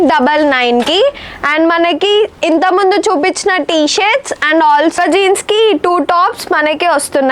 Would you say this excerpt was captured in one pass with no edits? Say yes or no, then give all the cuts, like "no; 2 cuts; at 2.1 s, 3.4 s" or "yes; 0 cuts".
yes; 0 cuts